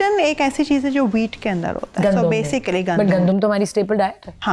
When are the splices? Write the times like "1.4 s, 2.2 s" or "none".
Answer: none